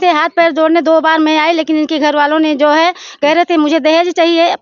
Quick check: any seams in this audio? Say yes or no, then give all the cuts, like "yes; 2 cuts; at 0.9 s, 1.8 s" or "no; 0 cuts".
no; 0 cuts